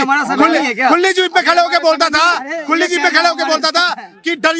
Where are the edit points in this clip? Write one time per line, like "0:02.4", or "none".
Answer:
none